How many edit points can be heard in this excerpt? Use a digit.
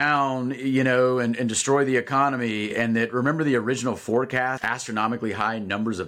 1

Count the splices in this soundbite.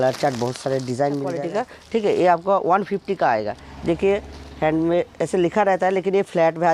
1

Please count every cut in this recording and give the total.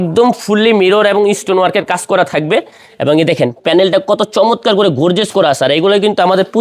0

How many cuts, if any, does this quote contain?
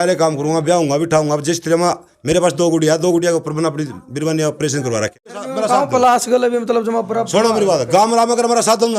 1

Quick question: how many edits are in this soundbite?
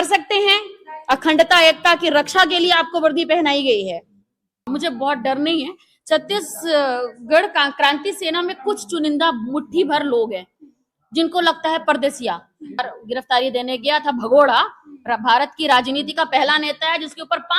2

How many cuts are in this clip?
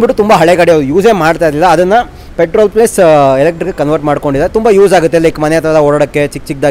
0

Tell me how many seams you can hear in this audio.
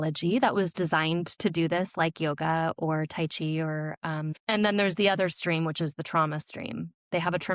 1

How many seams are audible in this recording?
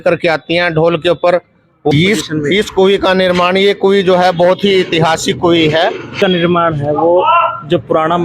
2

